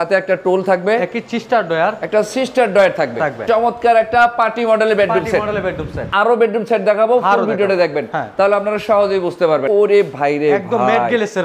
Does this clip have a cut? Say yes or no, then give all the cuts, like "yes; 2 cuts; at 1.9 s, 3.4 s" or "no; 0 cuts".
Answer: yes; 3 cuts; at 3.4 s, 6.0 s, 9.6 s